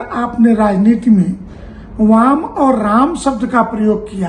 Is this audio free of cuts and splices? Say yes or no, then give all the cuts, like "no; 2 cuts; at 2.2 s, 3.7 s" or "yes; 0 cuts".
yes; 0 cuts